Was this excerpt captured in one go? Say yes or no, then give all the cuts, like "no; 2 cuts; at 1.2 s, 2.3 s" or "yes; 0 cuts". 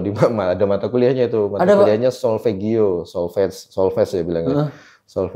yes; 0 cuts